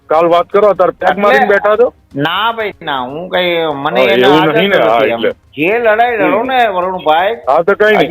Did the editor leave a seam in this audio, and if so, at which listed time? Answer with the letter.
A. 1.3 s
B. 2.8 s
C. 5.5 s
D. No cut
C